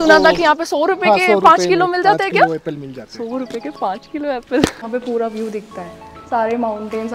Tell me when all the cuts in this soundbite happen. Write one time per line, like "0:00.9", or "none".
0:04.8